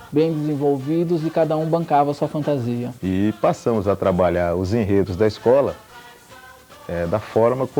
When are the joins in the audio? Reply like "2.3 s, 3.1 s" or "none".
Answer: 3.1 s